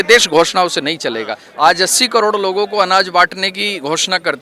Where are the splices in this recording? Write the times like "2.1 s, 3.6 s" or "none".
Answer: 1.4 s